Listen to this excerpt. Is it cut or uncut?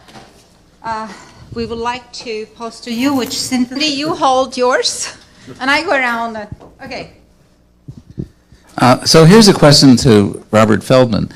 uncut